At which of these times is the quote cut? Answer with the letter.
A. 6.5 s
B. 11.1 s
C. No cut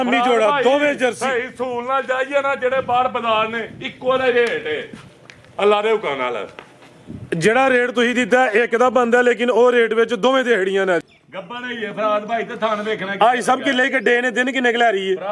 B